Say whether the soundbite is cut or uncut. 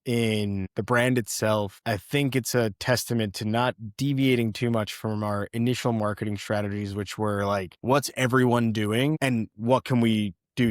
cut